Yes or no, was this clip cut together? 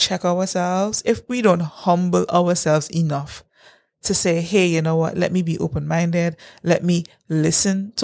yes